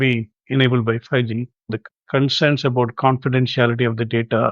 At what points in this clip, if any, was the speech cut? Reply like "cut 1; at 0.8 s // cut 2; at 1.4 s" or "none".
cut 1; at 1.8 s